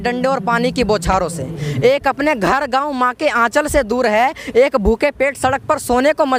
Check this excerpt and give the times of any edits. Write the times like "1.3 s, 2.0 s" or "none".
none